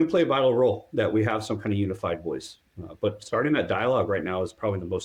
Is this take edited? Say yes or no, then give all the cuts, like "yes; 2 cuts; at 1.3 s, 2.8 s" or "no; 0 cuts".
no; 0 cuts